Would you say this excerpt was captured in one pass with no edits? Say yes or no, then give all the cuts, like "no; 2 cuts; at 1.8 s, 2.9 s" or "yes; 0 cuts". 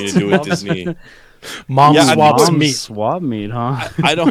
yes; 0 cuts